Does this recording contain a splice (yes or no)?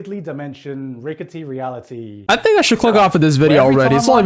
no